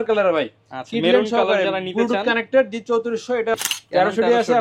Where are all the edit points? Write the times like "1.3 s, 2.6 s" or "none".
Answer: 3.6 s

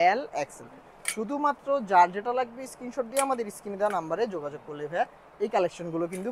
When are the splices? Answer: none

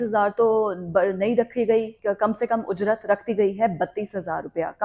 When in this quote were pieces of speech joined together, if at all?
1.9 s

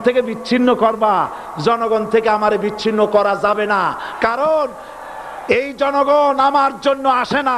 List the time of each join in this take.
none

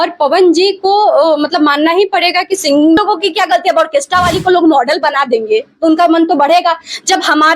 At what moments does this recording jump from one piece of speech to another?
3.0 s

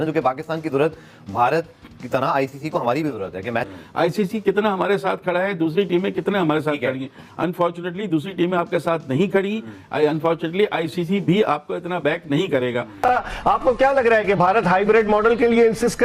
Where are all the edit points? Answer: 3.8 s, 13.0 s

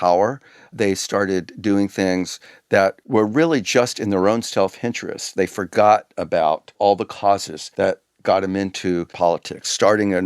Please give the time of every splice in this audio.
7.6 s, 9.1 s

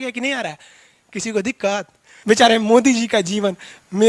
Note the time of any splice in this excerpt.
2.1 s

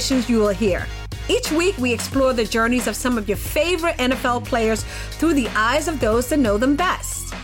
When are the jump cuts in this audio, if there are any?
none

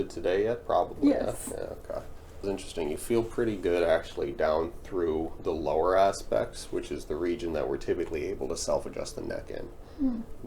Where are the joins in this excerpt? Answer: 2.4 s

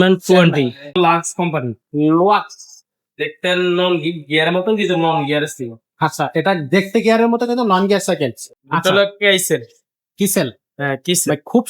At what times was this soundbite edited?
0.9 s, 8.6 s

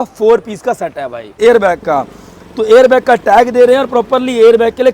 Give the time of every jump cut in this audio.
1.3 s

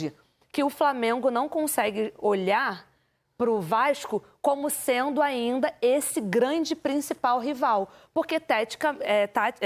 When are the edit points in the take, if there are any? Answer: none

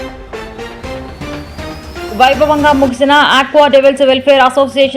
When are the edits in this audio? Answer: 2.1 s

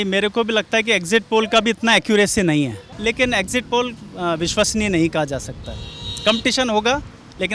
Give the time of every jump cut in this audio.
2.8 s

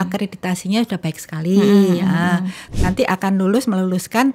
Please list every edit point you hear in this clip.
2.6 s

